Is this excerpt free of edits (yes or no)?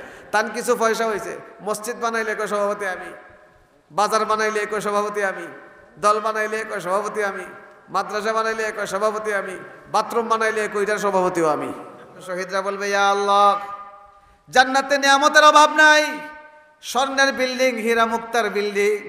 no